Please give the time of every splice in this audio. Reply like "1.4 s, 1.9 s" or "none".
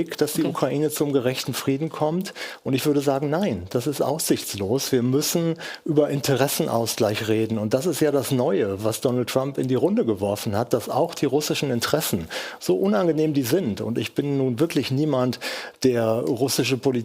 none